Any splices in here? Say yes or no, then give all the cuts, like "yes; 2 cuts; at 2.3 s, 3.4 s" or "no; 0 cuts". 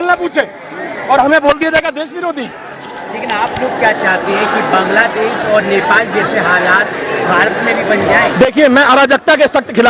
no; 0 cuts